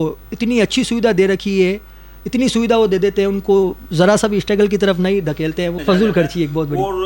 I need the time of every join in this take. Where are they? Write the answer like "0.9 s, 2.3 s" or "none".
5.8 s